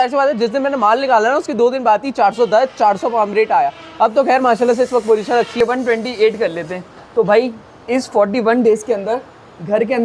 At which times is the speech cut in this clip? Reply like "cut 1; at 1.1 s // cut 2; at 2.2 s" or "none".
cut 1; at 5.6 s